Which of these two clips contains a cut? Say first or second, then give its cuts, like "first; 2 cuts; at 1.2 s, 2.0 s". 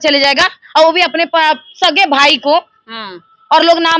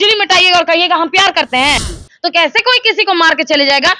second; 1 cut; at 1.9 s